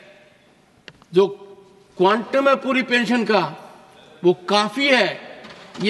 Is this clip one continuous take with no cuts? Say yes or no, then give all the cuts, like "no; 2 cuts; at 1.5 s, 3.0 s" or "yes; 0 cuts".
yes; 0 cuts